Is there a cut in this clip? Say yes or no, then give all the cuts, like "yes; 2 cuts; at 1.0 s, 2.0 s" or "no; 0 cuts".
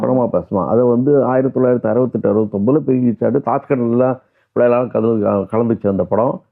no; 0 cuts